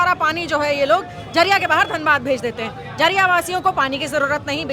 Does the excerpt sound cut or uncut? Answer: uncut